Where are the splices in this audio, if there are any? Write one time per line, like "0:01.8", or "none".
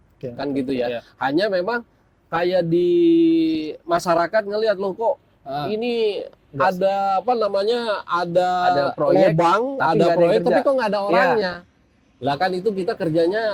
none